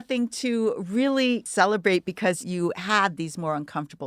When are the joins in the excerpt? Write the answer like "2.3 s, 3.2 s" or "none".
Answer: 1.5 s